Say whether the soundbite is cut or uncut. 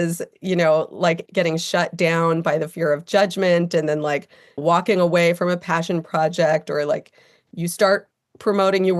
cut